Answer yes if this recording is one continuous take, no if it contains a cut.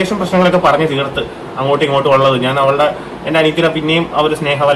yes